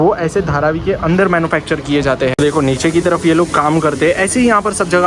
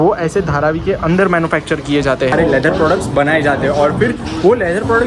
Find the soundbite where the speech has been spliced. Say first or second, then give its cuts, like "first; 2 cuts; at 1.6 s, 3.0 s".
second; 1 cut; at 2.3 s